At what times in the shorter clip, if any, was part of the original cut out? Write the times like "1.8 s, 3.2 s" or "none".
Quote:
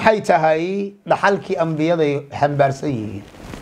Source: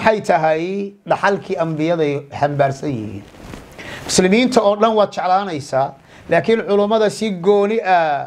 none